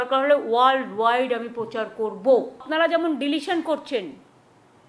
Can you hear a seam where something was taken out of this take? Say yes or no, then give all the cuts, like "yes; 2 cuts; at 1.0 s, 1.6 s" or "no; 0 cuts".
yes; 1 cut; at 2.6 s